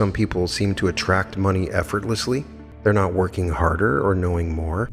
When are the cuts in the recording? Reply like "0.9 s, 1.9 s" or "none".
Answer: 2.6 s